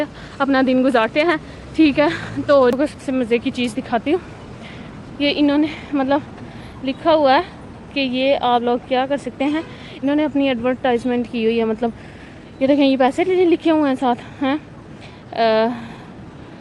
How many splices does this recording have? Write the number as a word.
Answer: one